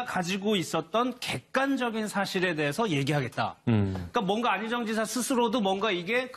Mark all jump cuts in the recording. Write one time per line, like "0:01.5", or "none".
0:03.4